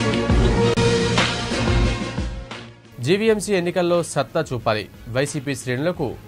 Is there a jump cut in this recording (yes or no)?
yes